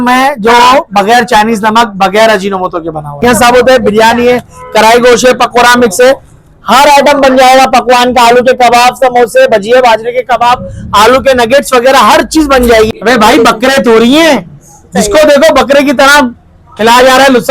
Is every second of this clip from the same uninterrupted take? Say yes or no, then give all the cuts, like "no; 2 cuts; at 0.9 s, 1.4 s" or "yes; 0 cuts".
no; 2 cuts; at 3.2 s, 12.9 s